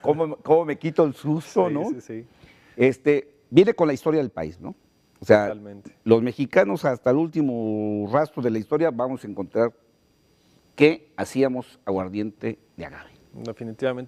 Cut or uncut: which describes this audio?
uncut